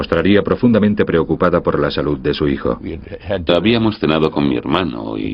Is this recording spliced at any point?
no; 0 cuts

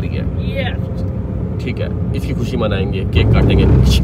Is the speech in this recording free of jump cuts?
yes; 0 cuts

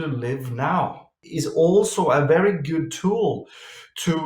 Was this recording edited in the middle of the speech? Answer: yes; 1 cut; at 1.2 s

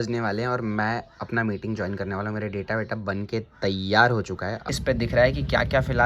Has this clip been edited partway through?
yes; 1 cut; at 4.7 s

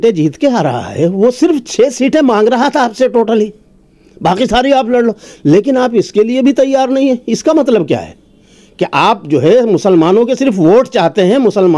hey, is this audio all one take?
yes; 0 cuts

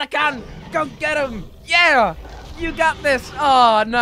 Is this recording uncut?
yes; 0 cuts

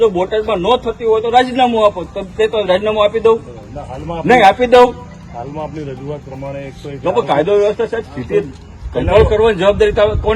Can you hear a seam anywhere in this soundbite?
no; 0 cuts

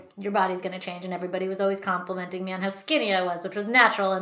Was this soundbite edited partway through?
no; 0 cuts

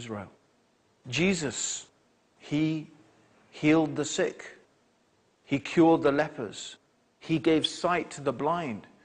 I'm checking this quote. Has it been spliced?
yes; 1 cut; at 7.9 s

